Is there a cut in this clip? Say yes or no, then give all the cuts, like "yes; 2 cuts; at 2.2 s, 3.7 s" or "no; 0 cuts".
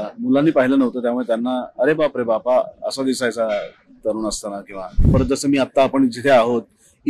yes; 1 cut; at 5.1 s